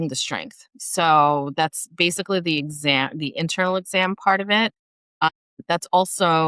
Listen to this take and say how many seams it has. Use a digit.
0